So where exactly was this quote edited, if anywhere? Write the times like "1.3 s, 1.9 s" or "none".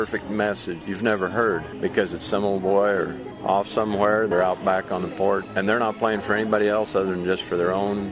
0.8 s, 1.7 s, 3.3 s, 4.3 s, 5.5 s